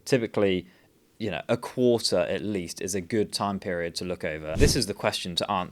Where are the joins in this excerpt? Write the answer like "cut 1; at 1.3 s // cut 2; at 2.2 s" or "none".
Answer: cut 1; at 4.5 s